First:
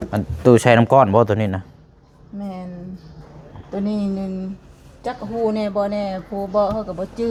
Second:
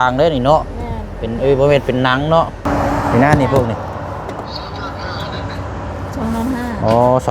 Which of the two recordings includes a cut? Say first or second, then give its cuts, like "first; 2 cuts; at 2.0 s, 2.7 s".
second; 1 cut; at 2.7 s